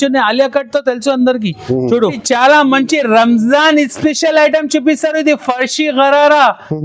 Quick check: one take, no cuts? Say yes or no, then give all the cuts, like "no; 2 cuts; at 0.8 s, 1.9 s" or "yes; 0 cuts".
no; 1 cut; at 2.2 s